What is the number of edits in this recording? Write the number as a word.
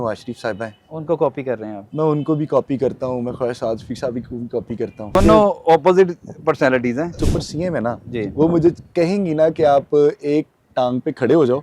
two